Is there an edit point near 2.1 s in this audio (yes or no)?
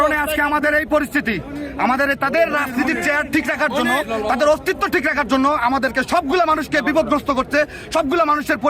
no